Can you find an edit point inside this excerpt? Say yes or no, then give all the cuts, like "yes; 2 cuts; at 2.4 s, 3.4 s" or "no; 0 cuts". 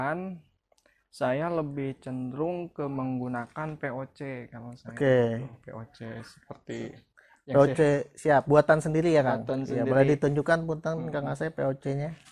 no; 0 cuts